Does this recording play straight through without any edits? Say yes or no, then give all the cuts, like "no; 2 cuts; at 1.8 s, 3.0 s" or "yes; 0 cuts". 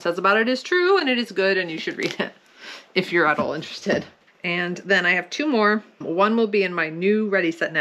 yes; 0 cuts